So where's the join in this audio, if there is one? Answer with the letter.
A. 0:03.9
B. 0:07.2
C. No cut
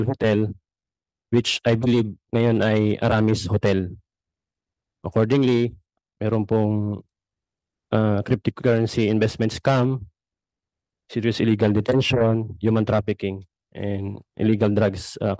C